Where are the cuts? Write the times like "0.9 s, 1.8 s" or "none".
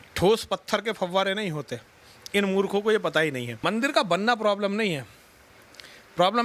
3.5 s